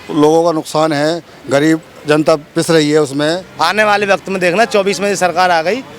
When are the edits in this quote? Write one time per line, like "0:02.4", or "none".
0:03.5